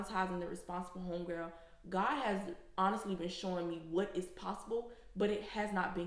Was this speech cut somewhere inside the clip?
no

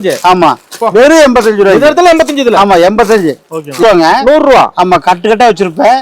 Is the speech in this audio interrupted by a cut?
yes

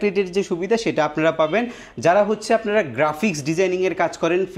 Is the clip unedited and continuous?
yes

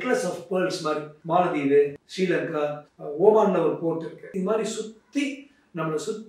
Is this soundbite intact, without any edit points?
no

